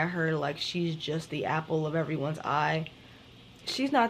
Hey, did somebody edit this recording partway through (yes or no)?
no